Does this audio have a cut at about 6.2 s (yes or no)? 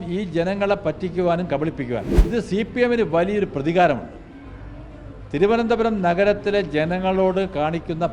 no